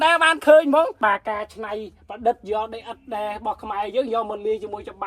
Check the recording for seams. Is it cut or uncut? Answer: cut